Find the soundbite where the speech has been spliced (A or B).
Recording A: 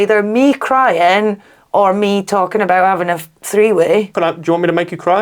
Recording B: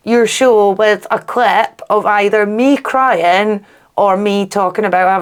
A